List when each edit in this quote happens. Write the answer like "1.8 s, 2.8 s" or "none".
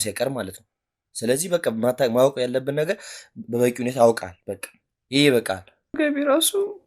6.0 s